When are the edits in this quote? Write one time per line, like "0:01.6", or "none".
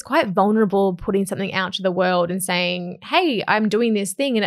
none